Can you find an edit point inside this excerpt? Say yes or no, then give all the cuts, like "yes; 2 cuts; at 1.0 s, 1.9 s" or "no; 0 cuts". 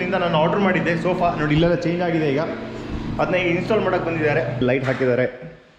yes; 1 cut; at 4.6 s